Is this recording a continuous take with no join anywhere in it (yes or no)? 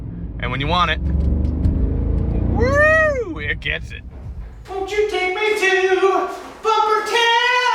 no